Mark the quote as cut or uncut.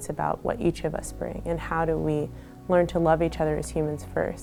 uncut